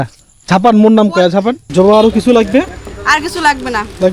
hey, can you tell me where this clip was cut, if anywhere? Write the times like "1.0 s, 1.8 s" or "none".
1.6 s